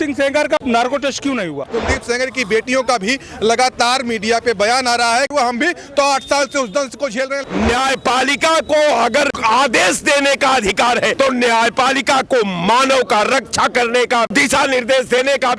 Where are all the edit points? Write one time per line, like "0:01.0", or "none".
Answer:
0:01.7
0:05.3
0:07.3
0:09.3
0:11.1
0:14.3